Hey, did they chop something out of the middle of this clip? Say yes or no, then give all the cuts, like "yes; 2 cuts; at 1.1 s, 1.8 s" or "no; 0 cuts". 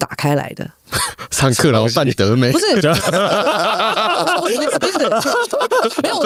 no; 0 cuts